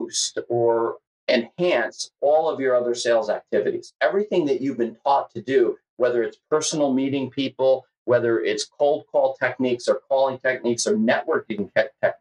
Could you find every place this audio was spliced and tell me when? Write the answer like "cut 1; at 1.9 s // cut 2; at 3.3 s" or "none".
cut 1; at 1.0 s